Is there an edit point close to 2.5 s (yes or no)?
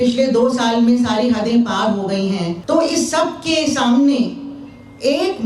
yes